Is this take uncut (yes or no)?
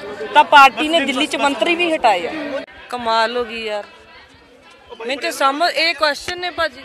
yes